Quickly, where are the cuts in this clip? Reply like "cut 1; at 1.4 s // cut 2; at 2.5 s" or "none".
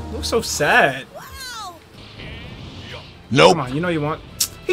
cut 1; at 2.0 s